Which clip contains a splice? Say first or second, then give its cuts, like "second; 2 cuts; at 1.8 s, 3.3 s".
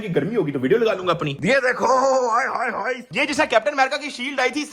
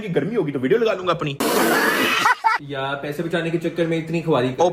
first; 2 cuts; at 1.3 s, 3.1 s